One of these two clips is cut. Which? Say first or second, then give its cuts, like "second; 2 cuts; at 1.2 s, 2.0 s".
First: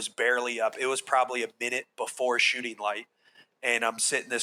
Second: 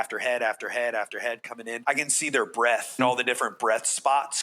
second; 2 cuts; at 1.7 s, 3.0 s